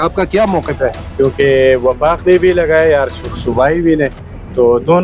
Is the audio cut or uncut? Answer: cut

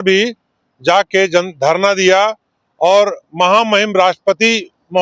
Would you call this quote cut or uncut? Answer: uncut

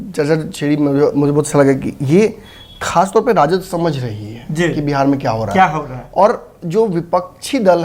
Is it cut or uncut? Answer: uncut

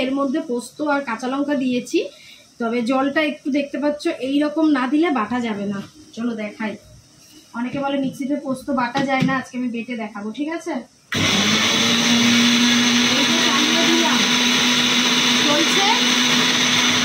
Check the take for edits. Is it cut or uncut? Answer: uncut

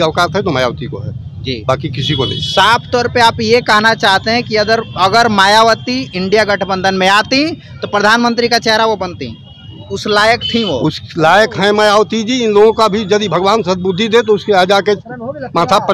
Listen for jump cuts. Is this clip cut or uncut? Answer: uncut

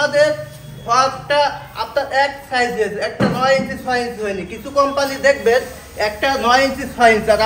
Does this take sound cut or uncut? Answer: uncut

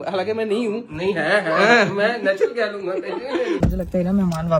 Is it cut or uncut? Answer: cut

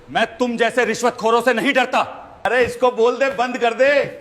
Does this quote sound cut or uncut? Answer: cut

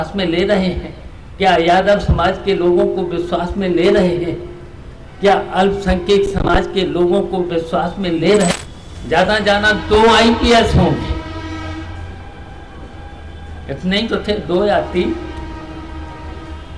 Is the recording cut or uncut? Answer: cut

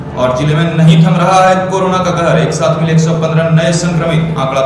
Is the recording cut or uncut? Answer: uncut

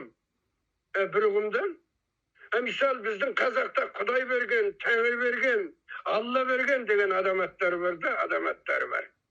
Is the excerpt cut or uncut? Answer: uncut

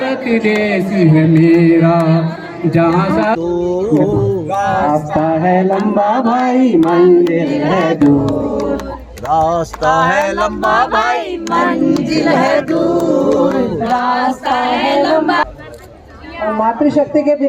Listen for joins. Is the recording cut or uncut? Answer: cut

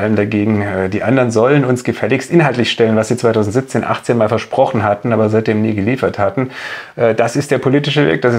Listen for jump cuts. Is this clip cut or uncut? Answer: uncut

